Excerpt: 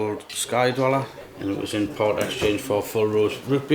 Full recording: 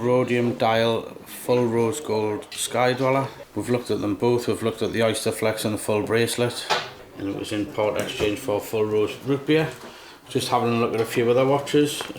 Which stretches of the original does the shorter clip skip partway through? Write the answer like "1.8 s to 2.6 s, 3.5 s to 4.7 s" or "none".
3.4 s to 7.0 s